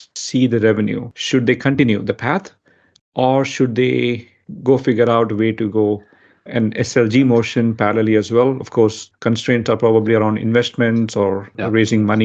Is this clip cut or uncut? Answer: cut